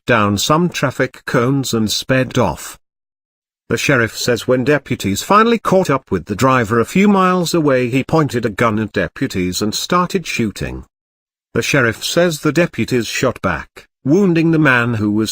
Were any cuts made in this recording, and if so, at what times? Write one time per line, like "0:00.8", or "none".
none